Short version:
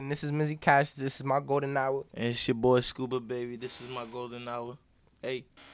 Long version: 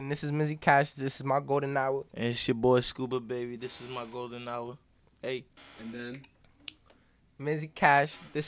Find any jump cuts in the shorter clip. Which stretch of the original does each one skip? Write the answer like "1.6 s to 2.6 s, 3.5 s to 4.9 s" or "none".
none